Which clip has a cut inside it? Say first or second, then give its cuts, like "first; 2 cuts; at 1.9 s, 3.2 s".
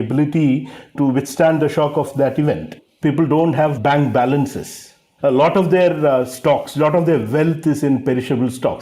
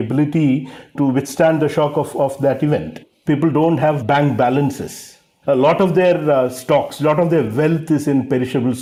first; 1 cut; at 2.1 s